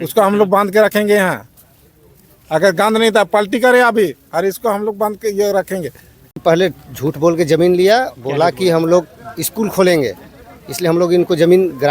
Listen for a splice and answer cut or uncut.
cut